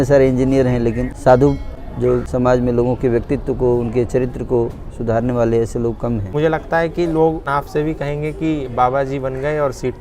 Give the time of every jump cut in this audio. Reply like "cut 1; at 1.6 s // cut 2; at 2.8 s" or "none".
cut 1; at 1.1 s // cut 2; at 2.3 s // cut 3; at 6.3 s // cut 4; at 7.4 s